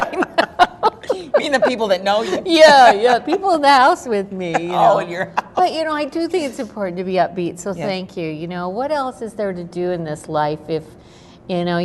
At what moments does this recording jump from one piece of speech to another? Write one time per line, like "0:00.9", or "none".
0:07.1